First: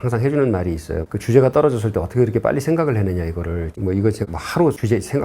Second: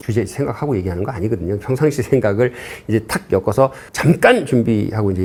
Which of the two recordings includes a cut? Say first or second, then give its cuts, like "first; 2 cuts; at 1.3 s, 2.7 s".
first; 2 cuts; at 1.0 s, 3.8 s